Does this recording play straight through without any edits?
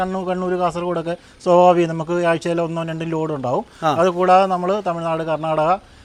yes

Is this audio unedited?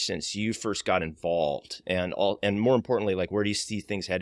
yes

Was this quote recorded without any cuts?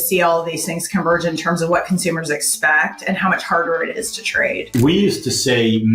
no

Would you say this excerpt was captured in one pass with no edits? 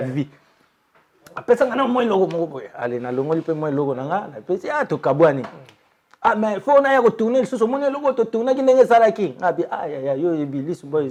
yes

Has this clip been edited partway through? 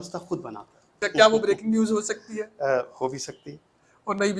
yes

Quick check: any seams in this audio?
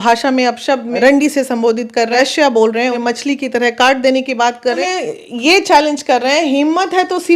yes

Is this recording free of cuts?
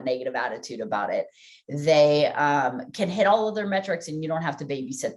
yes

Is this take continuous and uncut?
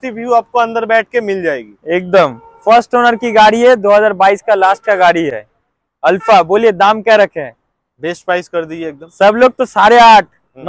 yes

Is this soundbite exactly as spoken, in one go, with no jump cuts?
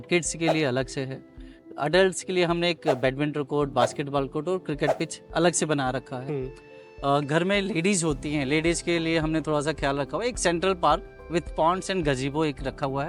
yes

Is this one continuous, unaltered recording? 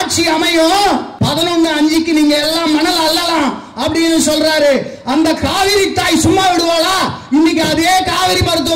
no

